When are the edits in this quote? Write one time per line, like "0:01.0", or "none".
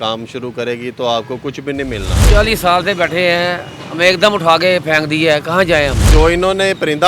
0:02.1
0:06.1